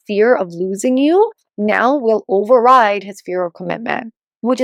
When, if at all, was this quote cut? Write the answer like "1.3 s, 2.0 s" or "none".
none